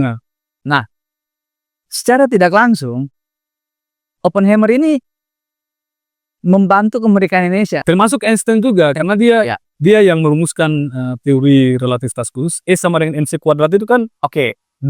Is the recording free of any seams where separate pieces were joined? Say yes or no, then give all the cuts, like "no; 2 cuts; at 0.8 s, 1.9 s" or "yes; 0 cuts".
no; 1 cut; at 7.8 s